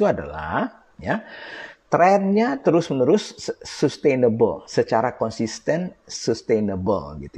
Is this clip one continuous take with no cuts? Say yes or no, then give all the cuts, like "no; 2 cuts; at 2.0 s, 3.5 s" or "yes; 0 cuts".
yes; 0 cuts